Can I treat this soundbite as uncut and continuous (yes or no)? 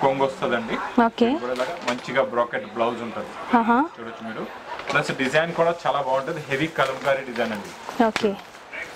yes